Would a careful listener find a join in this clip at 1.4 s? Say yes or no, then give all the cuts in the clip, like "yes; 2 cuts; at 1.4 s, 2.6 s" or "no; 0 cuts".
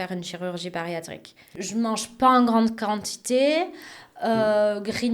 yes; 1 cut; at 1.4 s